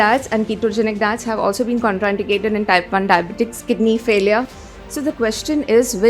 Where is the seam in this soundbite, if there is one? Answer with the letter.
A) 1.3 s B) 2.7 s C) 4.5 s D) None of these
C